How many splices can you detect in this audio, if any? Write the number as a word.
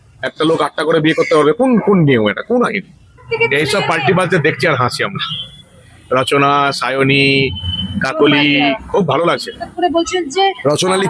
two